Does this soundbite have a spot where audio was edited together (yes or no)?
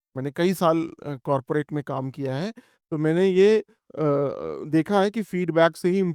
no